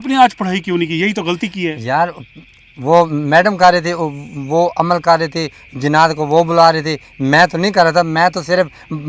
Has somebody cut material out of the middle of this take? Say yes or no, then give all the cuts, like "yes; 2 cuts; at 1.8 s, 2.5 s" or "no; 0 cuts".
no; 0 cuts